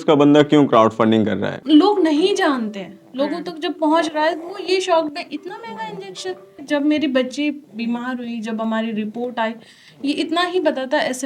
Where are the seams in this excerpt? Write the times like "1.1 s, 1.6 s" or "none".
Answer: 1.5 s, 6.6 s

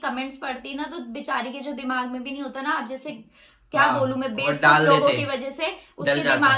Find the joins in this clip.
none

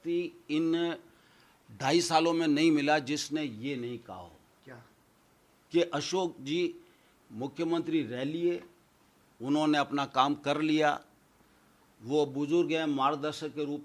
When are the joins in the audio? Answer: none

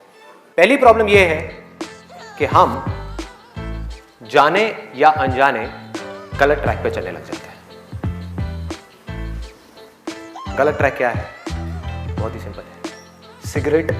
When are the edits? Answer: 7.2 s, 10.2 s

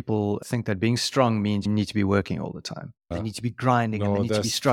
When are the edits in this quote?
1.7 s, 3.1 s

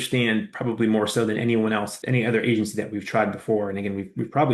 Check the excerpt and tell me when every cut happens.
2.0 s

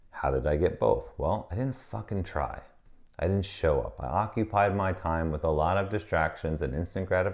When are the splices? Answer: none

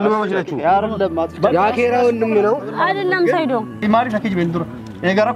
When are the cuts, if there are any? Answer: 3.8 s

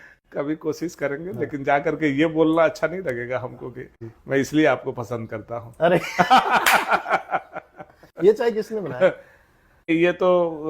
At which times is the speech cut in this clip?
8.0 s

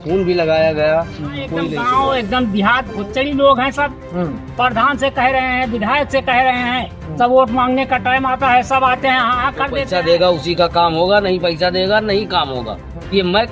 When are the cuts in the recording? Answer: 1.8 s, 9.9 s

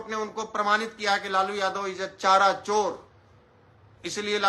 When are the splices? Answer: none

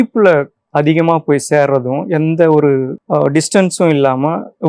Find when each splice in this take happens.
3.0 s

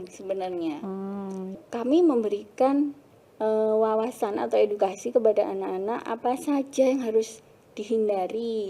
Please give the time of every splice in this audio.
1.6 s

